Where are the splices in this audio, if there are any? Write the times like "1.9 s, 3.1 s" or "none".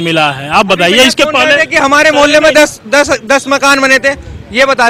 none